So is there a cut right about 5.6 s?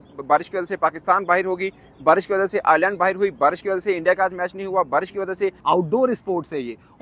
yes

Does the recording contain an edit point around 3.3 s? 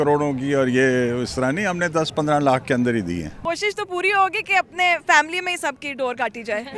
yes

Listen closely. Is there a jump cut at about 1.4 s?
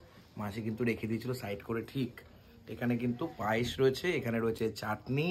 no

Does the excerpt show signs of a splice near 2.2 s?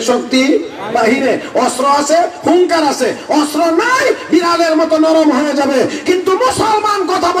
no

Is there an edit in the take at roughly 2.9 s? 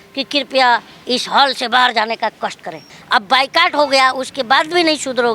yes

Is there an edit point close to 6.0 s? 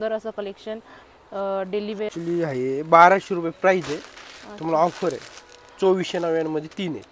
no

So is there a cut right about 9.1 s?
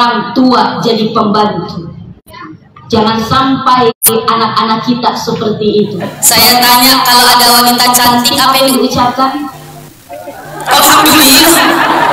no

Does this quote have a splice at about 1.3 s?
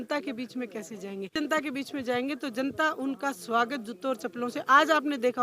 yes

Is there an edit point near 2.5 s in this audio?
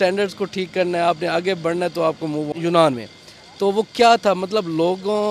yes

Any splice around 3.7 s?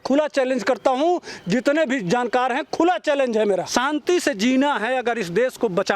yes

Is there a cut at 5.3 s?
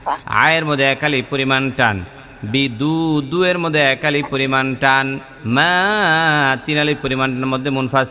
yes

